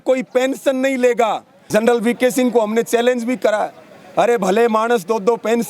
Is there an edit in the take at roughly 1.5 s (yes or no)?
yes